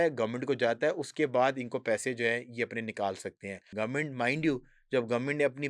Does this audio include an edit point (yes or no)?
yes